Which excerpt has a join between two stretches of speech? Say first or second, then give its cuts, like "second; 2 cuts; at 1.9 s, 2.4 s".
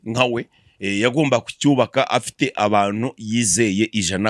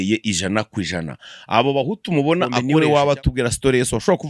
second; 1 cut; at 2.6 s